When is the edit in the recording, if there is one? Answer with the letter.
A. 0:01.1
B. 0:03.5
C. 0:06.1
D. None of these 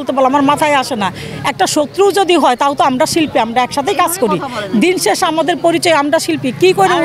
D